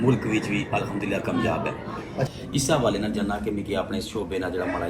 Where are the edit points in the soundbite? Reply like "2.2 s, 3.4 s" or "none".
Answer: 2.3 s